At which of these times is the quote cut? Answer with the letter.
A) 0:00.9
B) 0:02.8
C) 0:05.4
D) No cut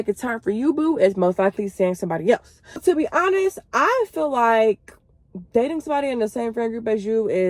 B